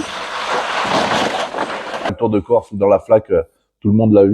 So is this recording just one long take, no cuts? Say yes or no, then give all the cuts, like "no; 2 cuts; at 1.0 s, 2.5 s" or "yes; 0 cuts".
no; 1 cut; at 2.1 s